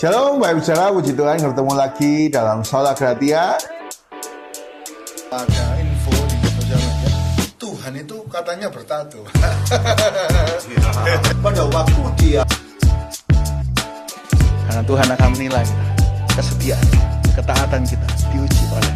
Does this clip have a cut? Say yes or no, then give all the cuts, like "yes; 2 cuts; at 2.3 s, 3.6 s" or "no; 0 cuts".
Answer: no; 0 cuts